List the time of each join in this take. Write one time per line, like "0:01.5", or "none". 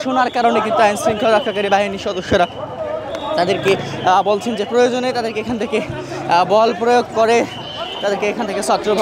none